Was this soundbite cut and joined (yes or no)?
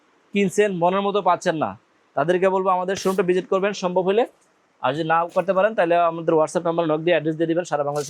no